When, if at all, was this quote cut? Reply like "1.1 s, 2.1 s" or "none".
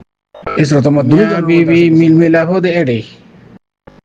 1.4 s